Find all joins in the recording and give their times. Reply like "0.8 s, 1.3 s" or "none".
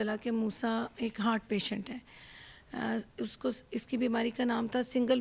none